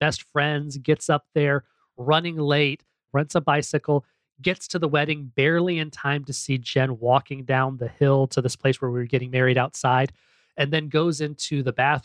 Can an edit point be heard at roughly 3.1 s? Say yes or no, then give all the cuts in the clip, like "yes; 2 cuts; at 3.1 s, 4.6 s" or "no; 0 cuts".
yes; 1 cut; at 3.1 s